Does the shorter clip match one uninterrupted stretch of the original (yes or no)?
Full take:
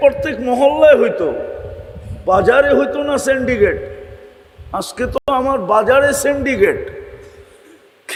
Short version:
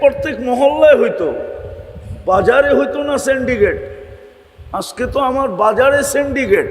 no